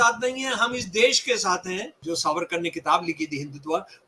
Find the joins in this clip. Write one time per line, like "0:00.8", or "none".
0:01.9